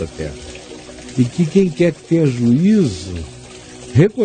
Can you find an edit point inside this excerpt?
yes; 1 cut; at 2.4 s

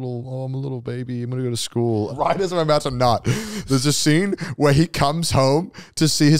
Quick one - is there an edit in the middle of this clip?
yes; 1 cut; at 2.1 s

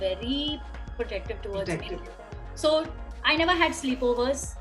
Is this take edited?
no; 0 cuts

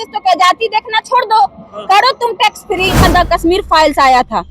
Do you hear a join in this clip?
yes; 1 cut; at 3.0 s

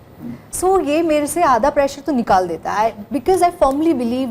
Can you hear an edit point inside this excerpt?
no; 0 cuts

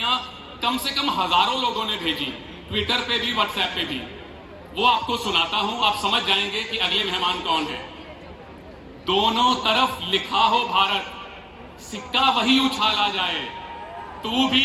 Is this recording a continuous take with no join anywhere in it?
yes; 0 cuts

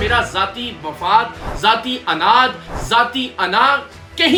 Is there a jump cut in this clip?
no; 0 cuts

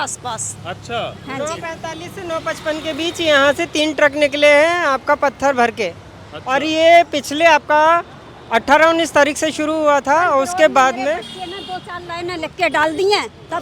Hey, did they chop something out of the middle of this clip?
no; 0 cuts

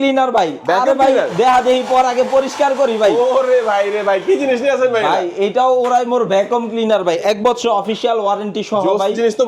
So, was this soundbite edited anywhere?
no; 0 cuts

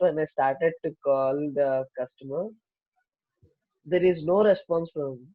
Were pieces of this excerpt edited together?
no; 0 cuts

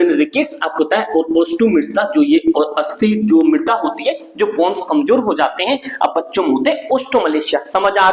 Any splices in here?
no; 0 cuts

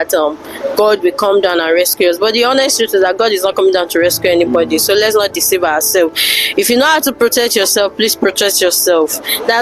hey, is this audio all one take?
yes; 0 cuts

